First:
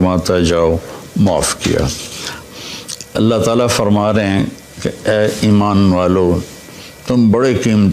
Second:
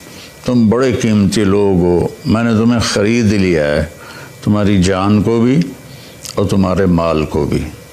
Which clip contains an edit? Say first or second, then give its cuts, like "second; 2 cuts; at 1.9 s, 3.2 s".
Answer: first; 1 cut; at 2.4 s